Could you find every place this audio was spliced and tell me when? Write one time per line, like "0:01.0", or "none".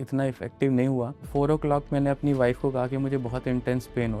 0:01.2